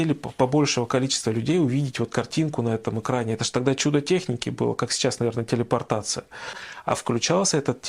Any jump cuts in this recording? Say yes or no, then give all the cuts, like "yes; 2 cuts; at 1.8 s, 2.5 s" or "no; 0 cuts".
yes; 1 cut; at 6.7 s